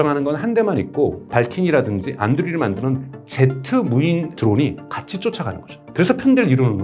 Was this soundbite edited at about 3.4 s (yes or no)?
no